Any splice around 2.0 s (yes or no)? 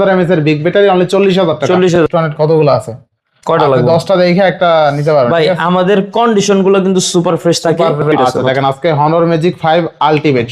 yes